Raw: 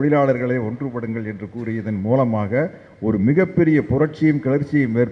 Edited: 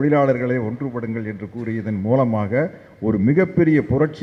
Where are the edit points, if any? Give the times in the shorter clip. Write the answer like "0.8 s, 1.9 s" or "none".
none